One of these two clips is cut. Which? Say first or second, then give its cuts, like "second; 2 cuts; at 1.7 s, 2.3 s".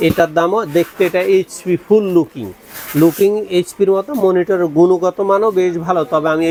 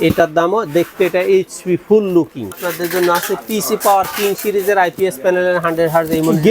second; 1 cut; at 2.7 s